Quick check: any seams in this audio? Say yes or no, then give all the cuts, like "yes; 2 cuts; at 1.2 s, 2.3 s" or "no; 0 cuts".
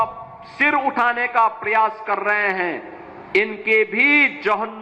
no; 0 cuts